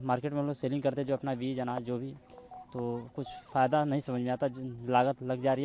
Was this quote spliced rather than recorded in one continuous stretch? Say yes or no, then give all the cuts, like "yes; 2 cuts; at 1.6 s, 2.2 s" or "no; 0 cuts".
no; 0 cuts